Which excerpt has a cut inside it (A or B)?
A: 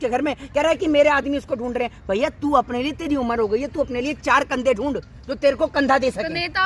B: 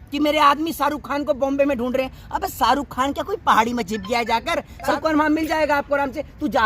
B